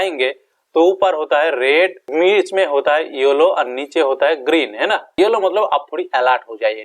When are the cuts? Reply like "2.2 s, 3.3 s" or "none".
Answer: 5.1 s